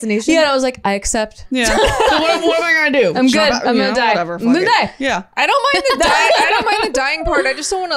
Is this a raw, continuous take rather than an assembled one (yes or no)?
no